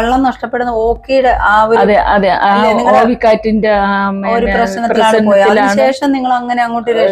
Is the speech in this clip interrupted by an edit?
no; 0 cuts

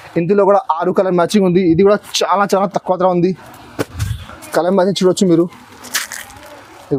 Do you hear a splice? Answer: no; 0 cuts

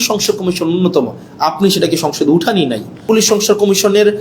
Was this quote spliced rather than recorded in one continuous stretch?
yes; 1 cut; at 3.0 s

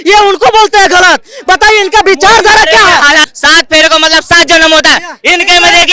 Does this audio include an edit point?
yes; 1 cut; at 3.2 s

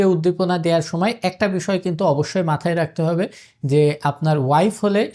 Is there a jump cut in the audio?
no; 0 cuts

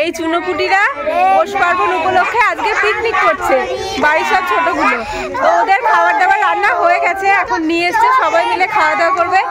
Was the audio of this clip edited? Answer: no; 0 cuts

